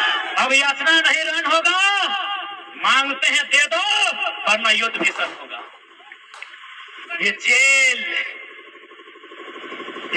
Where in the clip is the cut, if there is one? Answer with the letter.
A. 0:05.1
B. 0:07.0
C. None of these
B